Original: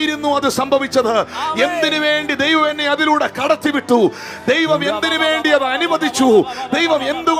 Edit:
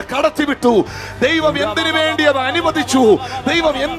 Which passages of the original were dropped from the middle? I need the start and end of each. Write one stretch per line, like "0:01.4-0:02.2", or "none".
none